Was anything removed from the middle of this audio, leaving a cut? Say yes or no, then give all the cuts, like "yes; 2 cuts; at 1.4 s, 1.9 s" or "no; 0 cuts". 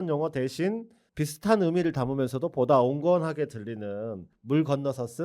yes; 2 cuts; at 1.0 s, 4.3 s